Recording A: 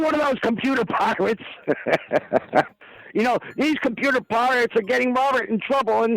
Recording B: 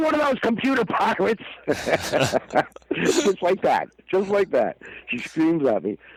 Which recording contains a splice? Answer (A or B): A